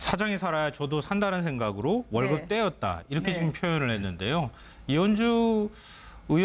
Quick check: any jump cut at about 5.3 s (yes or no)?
no